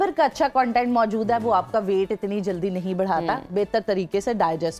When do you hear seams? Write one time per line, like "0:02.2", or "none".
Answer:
none